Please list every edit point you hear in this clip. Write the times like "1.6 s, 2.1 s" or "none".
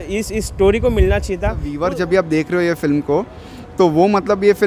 1.7 s